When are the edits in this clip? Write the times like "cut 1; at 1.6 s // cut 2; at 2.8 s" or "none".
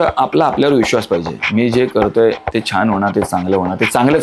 none